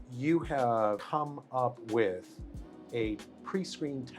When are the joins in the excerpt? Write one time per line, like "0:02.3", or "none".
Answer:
0:01.0